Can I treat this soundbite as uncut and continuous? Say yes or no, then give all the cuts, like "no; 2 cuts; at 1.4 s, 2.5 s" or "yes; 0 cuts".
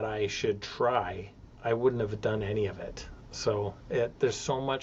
yes; 0 cuts